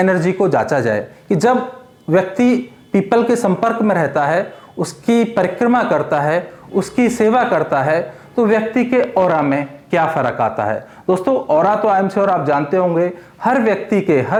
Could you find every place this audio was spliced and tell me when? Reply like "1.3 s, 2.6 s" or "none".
none